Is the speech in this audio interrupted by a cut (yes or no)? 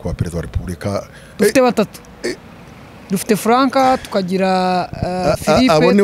yes